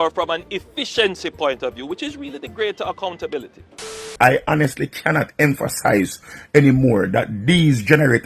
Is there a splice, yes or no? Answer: yes